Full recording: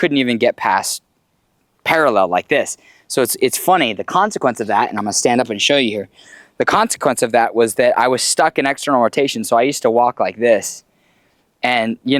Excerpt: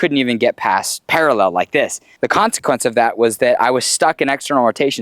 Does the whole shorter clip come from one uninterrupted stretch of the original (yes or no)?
no